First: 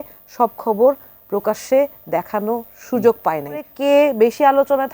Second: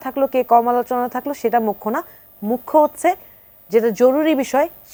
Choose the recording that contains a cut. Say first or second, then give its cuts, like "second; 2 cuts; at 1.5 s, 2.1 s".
first; 1 cut; at 3.7 s